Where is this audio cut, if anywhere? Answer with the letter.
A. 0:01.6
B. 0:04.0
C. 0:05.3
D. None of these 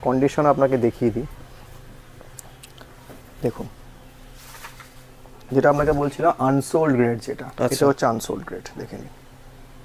D